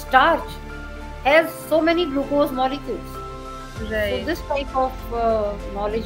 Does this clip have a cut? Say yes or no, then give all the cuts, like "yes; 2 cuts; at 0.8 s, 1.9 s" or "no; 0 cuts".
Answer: no; 0 cuts